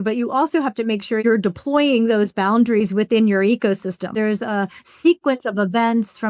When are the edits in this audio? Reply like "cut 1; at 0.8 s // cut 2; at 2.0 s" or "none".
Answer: cut 1; at 1.2 s // cut 2; at 4.1 s